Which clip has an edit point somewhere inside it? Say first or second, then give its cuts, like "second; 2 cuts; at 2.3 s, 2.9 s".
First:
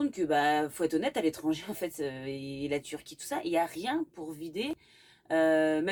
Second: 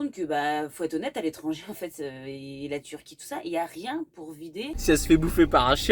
second; 1 cut; at 4.7 s